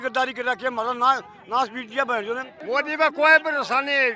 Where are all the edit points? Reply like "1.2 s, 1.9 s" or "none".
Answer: 2.5 s